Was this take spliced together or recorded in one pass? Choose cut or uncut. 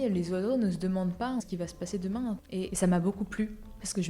cut